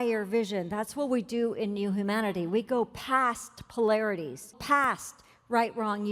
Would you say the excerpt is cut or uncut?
cut